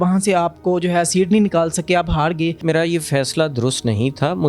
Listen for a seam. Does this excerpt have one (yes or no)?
yes